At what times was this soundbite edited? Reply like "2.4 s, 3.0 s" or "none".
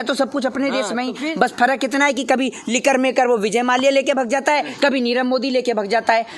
none

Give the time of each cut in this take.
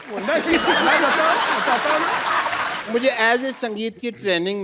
2.8 s

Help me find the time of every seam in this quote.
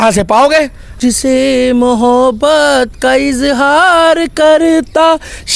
0.9 s

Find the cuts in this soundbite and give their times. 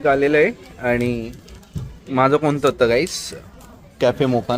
none

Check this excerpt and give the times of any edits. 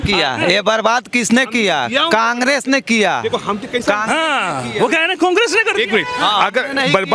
none

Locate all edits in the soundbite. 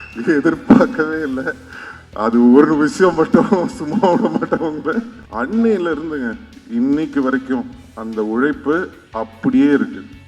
5.2 s

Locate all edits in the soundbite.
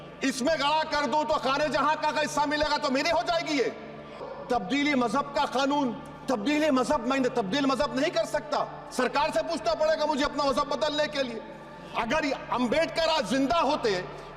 4.3 s

